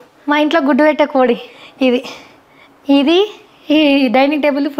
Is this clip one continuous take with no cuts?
yes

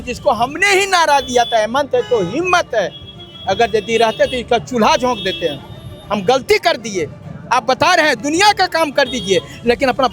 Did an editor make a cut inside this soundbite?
no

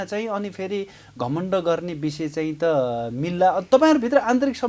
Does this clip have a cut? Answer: no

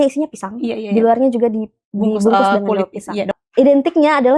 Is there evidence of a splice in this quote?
yes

